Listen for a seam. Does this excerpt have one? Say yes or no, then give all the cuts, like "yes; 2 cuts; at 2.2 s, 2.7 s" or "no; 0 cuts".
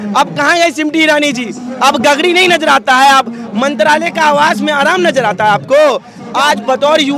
yes; 1 cut; at 6.2 s